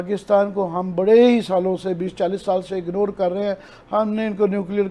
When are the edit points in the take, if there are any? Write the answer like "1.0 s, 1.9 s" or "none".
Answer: none